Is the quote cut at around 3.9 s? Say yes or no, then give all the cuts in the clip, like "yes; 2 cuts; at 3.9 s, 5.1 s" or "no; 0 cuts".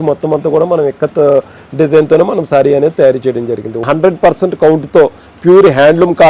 yes; 1 cut; at 3.9 s